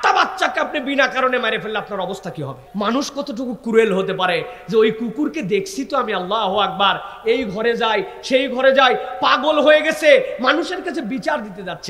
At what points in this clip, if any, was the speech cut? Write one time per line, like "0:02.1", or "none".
0:02.6